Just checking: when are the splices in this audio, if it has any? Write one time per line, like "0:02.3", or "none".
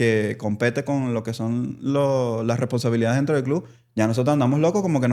none